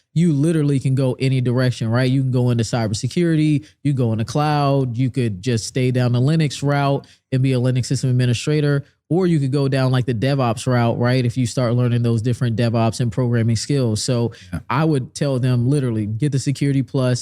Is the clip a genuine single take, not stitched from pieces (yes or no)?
yes